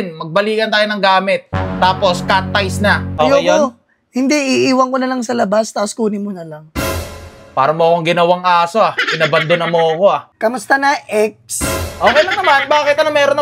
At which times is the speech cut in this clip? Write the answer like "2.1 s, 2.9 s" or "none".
3.1 s, 10.3 s